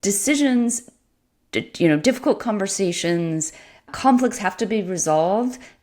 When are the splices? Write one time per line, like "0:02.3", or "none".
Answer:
0:03.9